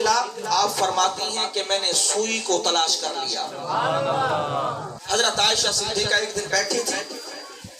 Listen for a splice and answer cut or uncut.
cut